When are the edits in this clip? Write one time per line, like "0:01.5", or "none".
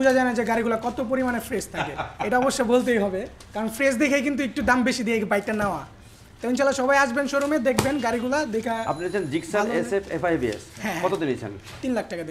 none